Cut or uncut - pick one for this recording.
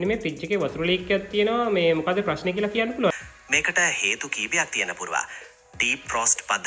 cut